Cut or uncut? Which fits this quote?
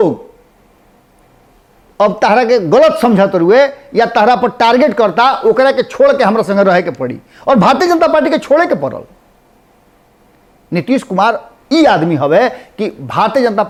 uncut